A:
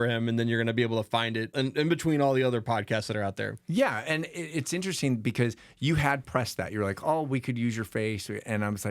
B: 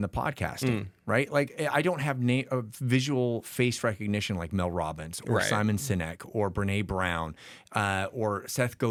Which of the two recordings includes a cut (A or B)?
A